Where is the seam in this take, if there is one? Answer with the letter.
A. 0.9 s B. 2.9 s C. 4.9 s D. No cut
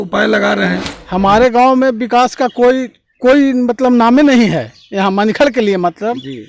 A